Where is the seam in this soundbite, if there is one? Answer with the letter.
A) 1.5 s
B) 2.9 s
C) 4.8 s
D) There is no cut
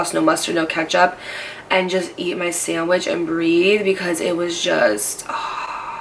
D